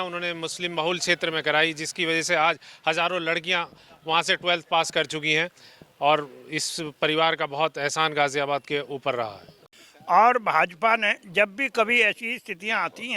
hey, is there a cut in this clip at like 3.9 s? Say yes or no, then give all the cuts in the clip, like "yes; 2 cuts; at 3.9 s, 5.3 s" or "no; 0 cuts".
no; 1 cut; at 9.7 s